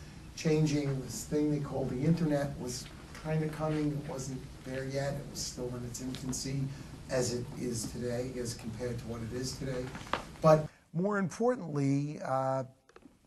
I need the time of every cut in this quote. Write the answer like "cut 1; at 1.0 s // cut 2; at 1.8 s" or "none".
none